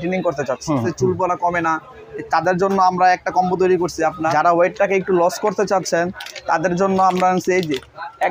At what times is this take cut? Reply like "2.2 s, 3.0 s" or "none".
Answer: 0.9 s, 4.2 s